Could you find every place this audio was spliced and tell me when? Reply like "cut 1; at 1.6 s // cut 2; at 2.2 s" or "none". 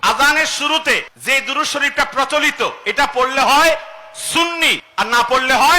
cut 1; at 1.1 s // cut 2; at 4.8 s